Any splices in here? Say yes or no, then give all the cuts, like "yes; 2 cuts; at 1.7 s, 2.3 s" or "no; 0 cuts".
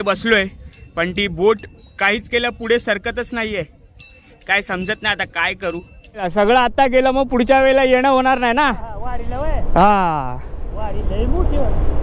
yes; 1 cut; at 6.3 s